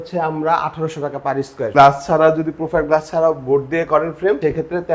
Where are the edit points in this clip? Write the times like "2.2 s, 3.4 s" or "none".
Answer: 1.7 s